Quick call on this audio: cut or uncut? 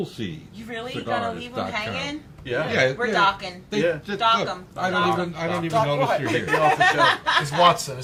uncut